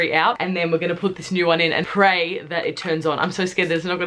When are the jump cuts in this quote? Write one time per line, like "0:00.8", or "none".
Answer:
none